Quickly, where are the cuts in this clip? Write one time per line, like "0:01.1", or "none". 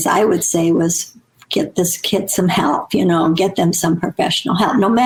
none